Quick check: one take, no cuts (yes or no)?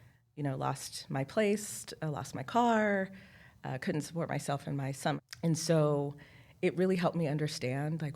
no